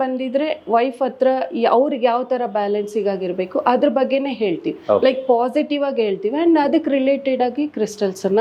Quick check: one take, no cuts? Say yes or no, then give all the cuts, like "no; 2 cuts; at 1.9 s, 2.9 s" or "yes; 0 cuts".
yes; 0 cuts